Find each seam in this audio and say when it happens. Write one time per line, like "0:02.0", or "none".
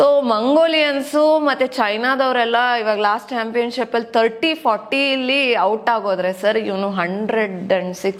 none